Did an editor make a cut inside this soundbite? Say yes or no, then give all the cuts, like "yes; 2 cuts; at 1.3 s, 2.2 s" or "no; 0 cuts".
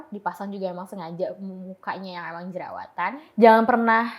yes; 1 cut; at 3.2 s